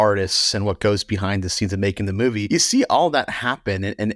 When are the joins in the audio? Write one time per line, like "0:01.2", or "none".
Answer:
0:02.4